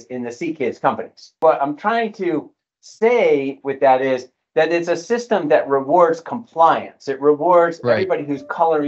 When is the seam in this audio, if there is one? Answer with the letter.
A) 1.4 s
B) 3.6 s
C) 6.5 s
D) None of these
A